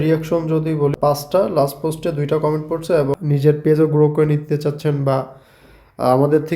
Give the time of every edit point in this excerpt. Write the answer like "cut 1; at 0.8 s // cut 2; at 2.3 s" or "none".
cut 1; at 1.1 s // cut 2; at 3.2 s